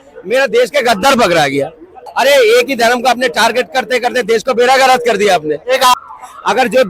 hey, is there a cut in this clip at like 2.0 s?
yes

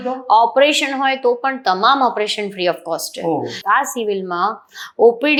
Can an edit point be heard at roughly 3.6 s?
no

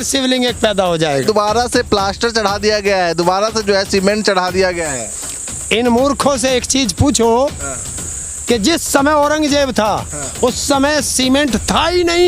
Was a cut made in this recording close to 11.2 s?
no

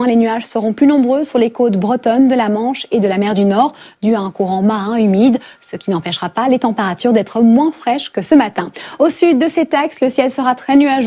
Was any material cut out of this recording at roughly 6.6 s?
yes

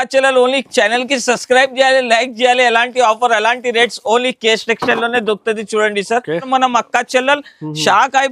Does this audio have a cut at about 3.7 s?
no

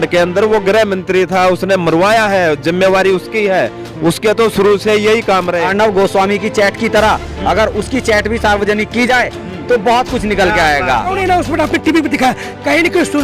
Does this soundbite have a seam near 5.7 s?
yes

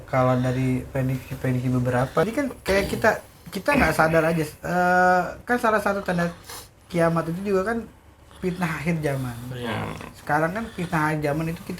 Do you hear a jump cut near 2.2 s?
yes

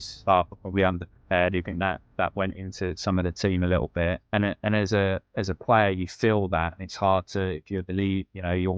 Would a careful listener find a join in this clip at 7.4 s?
no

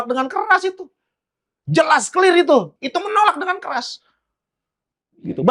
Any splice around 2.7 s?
yes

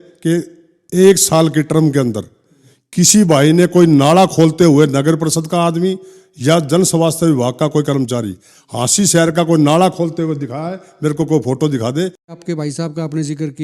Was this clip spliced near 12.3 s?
yes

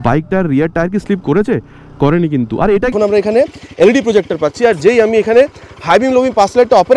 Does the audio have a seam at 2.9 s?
yes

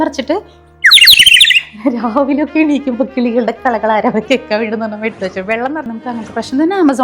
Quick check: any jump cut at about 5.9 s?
yes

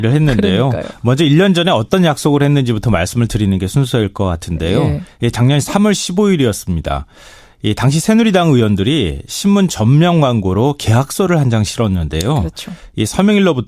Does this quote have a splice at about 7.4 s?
yes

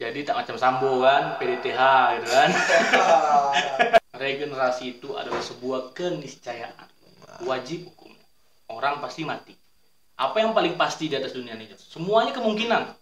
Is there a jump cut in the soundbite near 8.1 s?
no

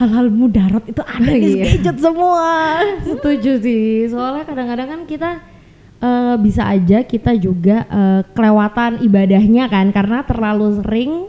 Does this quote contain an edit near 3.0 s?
no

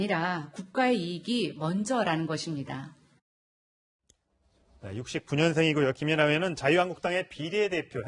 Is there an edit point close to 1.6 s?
no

